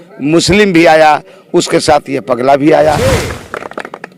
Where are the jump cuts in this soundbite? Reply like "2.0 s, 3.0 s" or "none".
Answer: 3.2 s